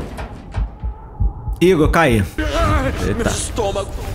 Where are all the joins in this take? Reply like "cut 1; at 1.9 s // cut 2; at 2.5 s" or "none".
cut 1; at 2.4 s